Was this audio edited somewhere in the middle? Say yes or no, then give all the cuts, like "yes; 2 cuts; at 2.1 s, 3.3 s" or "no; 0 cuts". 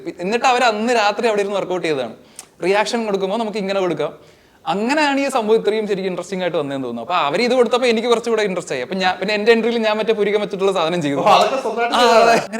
no; 0 cuts